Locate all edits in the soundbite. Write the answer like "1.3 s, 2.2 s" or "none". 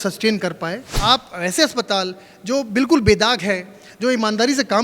0.9 s